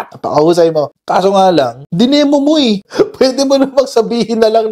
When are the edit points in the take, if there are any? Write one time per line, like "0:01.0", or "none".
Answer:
0:00.9
0:02.9